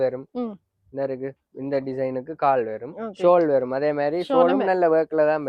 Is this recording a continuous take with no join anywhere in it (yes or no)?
yes